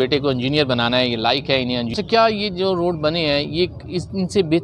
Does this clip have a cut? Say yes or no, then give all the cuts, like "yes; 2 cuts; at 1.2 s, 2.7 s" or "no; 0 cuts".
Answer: yes; 1 cut; at 1.9 s